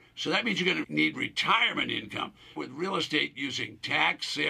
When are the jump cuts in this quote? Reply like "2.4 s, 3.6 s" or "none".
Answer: 0.8 s, 2.6 s